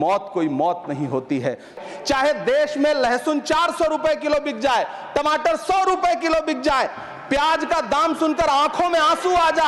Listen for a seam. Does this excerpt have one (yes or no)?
yes